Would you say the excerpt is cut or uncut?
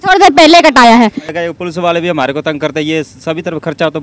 cut